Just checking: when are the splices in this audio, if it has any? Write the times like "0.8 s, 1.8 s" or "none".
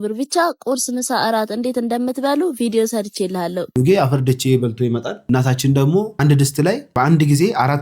3.7 s